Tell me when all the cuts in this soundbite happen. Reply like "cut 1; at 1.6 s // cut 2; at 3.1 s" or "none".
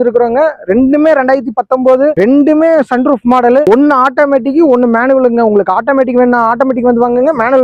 none